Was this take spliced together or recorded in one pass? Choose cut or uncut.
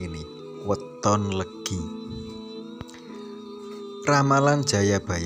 uncut